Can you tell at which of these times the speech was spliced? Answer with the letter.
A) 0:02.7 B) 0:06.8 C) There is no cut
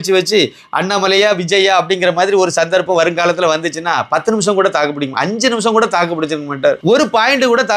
B